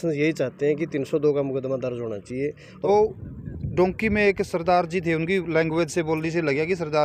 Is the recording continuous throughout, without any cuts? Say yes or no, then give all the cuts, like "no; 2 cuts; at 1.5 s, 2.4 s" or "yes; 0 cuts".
no; 1 cut; at 2.9 s